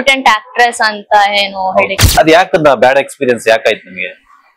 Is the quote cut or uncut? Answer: cut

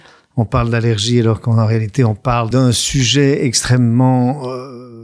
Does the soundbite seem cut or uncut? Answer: cut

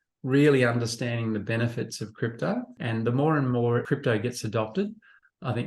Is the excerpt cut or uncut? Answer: cut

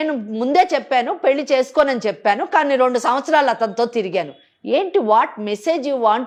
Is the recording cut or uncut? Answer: uncut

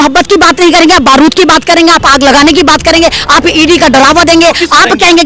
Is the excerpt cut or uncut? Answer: uncut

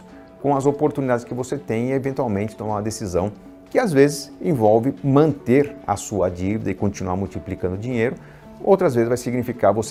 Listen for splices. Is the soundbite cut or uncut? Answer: uncut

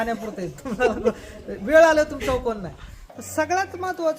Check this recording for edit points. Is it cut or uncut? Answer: cut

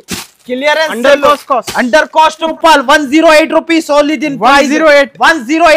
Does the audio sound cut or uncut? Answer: cut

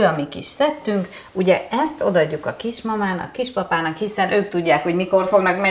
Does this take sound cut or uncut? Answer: uncut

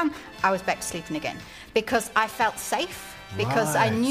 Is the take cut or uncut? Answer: uncut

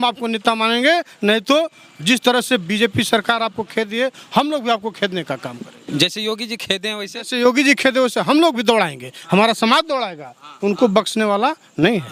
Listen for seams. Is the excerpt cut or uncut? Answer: uncut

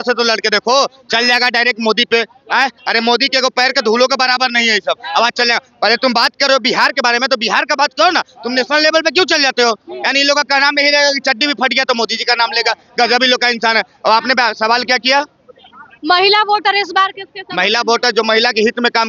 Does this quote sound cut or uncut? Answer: uncut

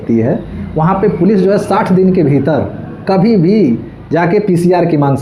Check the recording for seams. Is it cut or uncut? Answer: uncut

